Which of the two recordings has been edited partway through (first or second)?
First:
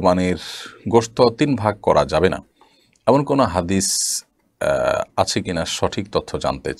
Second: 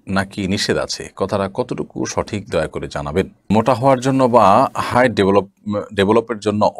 second